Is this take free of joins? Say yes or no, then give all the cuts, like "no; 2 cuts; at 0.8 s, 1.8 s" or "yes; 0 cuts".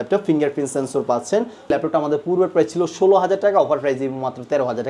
no; 1 cut; at 1.7 s